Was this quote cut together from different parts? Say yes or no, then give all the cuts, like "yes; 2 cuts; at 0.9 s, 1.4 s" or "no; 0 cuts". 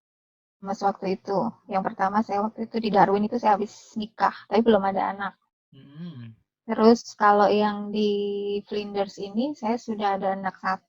no; 0 cuts